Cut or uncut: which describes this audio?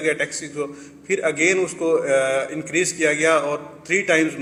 uncut